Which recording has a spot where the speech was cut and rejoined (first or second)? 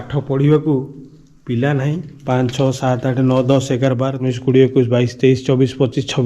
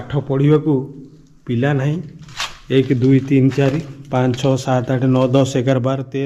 first